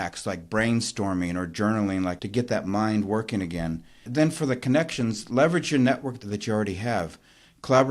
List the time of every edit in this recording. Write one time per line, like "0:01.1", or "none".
0:02.2
0:04.1
0:06.2